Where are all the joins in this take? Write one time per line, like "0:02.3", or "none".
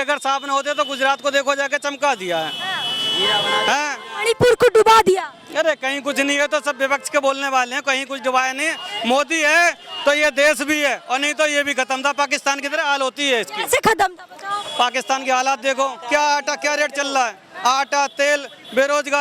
none